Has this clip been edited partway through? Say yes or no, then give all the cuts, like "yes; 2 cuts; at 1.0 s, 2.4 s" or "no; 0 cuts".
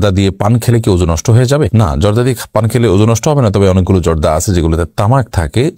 no; 0 cuts